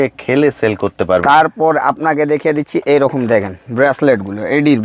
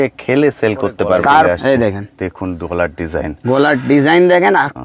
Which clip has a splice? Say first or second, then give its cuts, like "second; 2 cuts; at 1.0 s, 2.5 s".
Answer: second; 1 cut; at 1.5 s